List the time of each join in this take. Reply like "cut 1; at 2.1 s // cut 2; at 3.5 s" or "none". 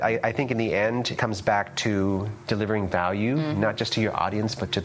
none